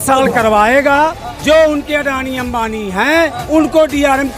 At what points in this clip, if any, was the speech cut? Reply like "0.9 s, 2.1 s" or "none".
1.3 s, 3.4 s